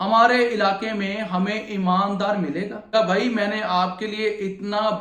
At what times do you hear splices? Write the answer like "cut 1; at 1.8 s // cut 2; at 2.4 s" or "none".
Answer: cut 1; at 2.9 s